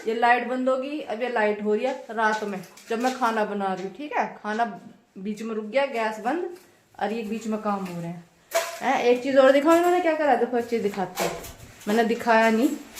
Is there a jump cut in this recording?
no; 0 cuts

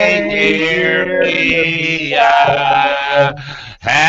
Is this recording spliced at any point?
no; 0 cuts

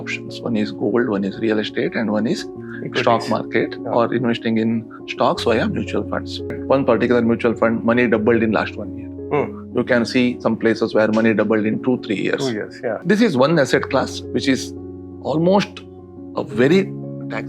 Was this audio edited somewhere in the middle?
yes; 2 cuts; at 6.6 s, 13.0 s

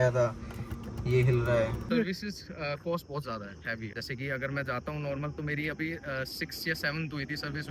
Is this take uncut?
no; 2 cuts; at 1.9 s, 4.0 s

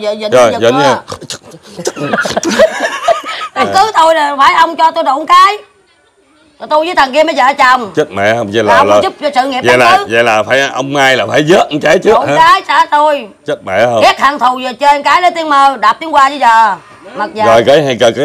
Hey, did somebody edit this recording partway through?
yes; 1 cut; at 3.7 s

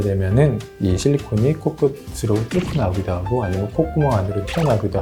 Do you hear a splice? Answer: no; 0 cuts

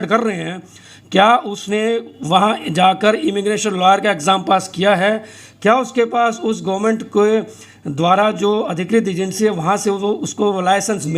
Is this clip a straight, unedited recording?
yes; 0 cuts

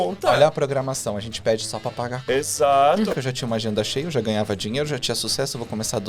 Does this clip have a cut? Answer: yes; 1 cut; at 3.1 s

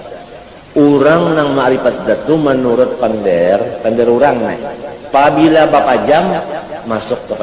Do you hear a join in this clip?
no; 0 cuts

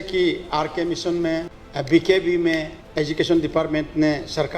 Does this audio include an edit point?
yes; 2 cuts; at 1.6 s, 2.8 s

